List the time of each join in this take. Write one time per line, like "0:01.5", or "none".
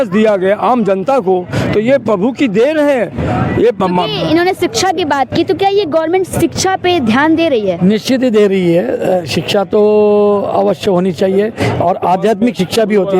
none